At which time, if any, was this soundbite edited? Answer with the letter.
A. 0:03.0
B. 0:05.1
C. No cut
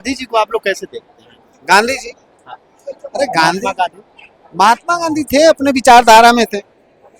C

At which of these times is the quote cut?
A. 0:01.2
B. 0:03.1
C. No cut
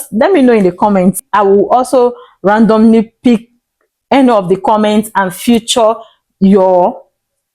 A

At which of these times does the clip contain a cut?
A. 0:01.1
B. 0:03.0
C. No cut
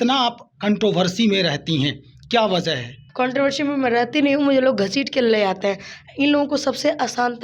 B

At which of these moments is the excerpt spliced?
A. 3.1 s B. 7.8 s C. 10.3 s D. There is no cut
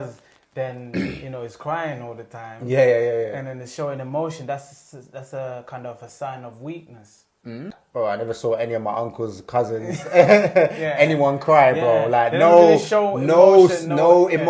B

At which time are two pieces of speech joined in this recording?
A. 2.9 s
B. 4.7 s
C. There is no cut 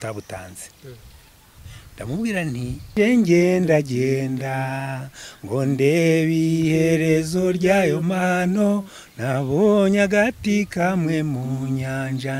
A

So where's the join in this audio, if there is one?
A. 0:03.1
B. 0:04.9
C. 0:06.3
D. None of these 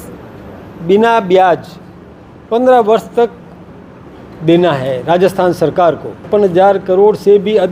C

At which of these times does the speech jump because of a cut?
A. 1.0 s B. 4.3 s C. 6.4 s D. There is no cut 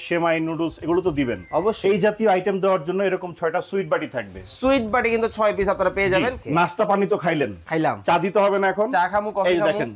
C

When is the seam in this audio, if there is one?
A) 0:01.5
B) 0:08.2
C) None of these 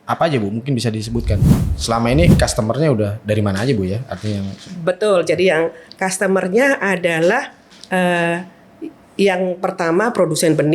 A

